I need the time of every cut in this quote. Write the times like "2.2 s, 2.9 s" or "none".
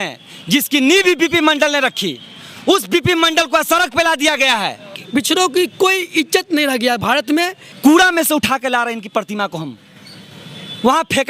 5.0 s, 7.6 s